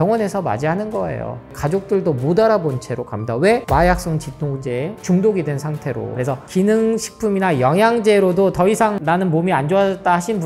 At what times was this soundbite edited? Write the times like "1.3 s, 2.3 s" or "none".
1.4 s, 6.2 s, 9.0 s

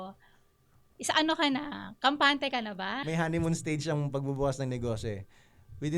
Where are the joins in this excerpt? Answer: 3.0 s

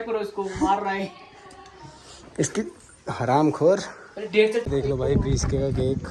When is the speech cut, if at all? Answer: 4.6 s

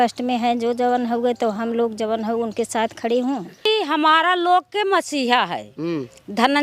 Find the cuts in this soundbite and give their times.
3.7 s

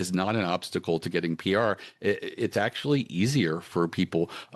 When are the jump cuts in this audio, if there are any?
none

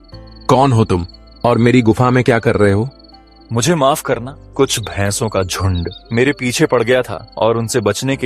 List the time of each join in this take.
4.4 s, 6.0 s, 7.2 s

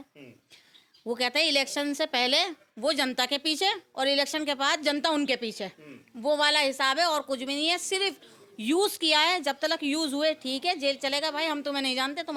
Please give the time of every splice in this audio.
none

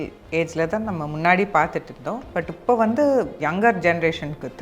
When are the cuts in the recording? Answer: 3.4 s

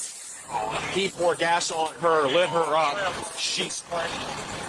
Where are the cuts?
none

